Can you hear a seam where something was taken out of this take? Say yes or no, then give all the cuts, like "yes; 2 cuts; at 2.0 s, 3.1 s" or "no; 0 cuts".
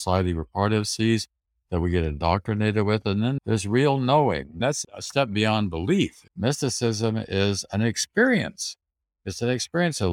yes; 3 cuts; at 3.4 s, 4.6 s, 6.2 s